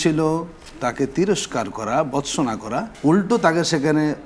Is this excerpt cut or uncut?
cut